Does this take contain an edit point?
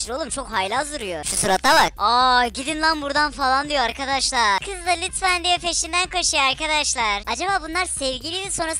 yes; 2 cuts; at 4.6 s, 7.3 s

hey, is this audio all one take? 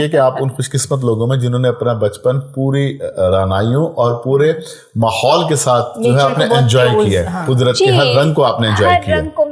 yes; 0 cuts

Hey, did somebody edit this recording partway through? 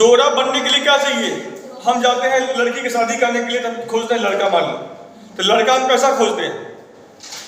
no; 0 cuts

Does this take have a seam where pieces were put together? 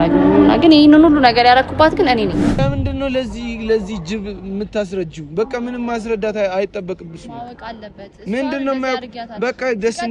yes; 1 cut; at 2.6 s

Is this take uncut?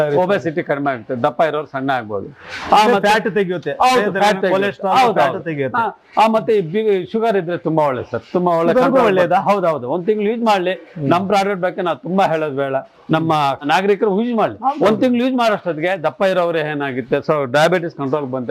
yes; 0 cuts

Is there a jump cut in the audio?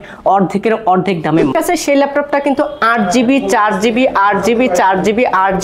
yes; 1 cut; at 1.5 s

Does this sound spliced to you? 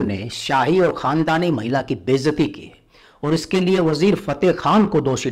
no; 0 cuts

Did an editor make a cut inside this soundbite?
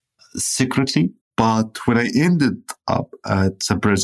yes; 1 cut; at 1.2 s

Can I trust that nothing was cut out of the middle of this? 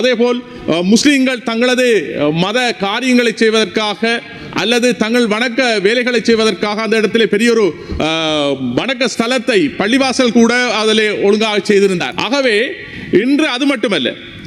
yes; 0 cuts

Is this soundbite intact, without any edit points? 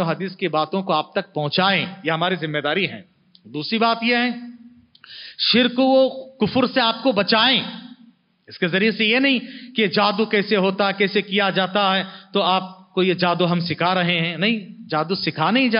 yes; 0 cuts

